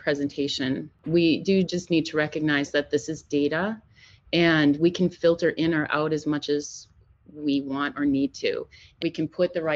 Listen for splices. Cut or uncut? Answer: cut